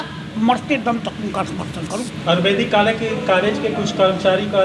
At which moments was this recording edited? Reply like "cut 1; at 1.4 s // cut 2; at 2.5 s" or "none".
cut 1; at 1.9 s

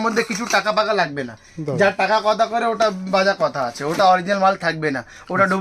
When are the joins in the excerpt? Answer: none

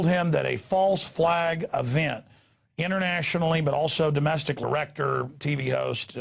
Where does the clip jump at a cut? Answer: none

